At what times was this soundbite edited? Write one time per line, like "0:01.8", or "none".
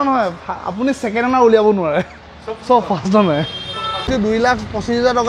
0:04.1